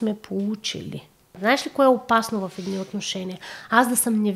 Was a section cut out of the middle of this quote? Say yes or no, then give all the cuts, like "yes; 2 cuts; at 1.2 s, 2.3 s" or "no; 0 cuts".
yes; 1 cut; at 1.3 s